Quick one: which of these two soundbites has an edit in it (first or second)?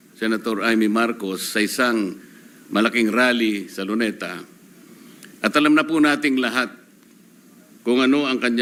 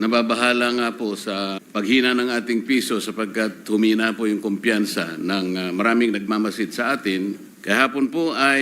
second